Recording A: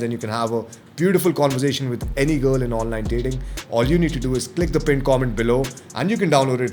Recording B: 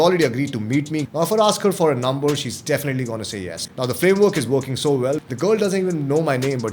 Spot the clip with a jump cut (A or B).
B